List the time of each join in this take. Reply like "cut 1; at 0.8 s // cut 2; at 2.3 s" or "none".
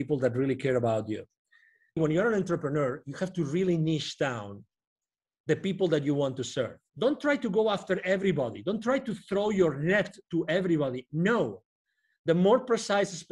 cut 1; at 2.0 s // cut 2; at 6.8 s